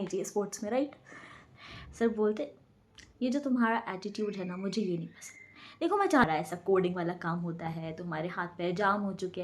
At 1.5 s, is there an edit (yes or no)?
yes